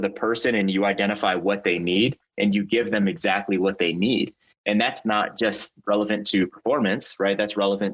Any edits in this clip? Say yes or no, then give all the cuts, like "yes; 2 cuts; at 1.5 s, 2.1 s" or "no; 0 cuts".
no; 0 cuts